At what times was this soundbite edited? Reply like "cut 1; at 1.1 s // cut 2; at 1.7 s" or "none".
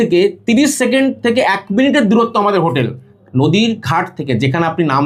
none